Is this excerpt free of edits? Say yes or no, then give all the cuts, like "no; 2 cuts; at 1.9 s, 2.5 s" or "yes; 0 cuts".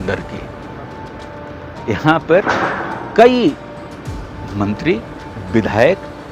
yes; 0 cuts